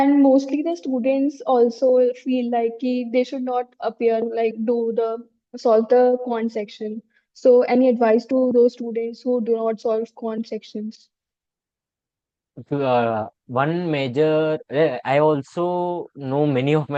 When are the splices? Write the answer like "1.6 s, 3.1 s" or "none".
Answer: none